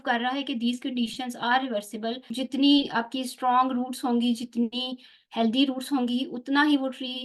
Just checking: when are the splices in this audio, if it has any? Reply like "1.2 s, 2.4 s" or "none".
2.3 s